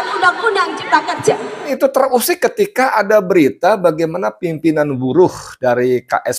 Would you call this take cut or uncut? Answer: cut